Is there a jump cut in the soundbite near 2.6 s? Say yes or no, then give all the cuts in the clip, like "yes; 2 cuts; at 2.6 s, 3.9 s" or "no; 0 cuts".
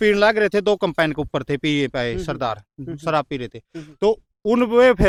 no; 0 cuts